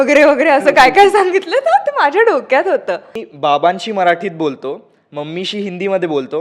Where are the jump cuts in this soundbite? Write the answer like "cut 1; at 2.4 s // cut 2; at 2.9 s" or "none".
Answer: cut 1; at 3.2 s